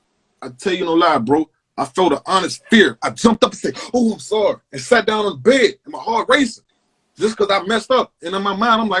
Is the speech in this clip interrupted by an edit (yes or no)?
no